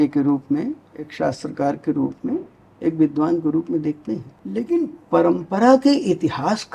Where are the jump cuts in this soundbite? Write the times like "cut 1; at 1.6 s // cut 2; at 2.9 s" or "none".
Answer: cut 1; at 1.1 s // cut 2; at 4.3 s